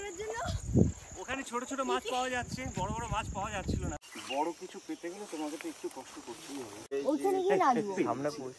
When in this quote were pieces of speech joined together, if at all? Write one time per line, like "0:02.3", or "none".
0:04.0
0:06.9

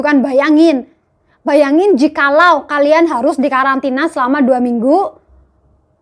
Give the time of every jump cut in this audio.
none

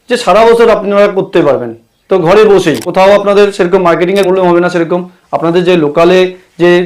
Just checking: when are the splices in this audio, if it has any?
0:02.8
0:04.3

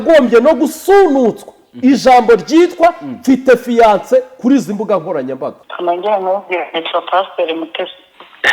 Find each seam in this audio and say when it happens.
0:05.6

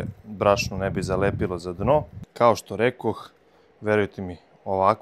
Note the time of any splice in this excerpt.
0:02.2

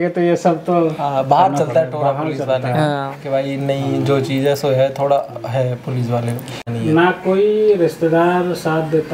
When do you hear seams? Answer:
0:06.7

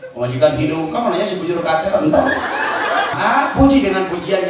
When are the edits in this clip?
0:03.1

